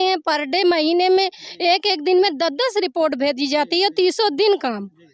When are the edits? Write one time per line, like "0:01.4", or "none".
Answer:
none